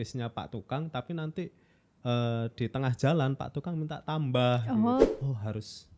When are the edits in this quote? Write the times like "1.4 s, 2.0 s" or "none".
5.1 s